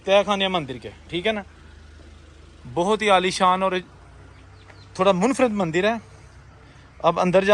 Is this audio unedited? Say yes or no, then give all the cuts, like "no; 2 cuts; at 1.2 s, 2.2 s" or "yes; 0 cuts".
yes; 0 cuts